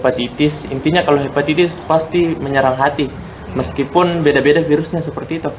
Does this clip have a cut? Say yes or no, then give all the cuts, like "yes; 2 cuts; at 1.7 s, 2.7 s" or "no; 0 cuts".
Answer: no; 0 cuts